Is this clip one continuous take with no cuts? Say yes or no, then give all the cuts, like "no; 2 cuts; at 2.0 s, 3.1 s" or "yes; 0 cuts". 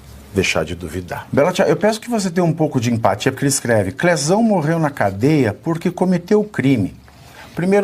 no; 1 cut; at 1.2 s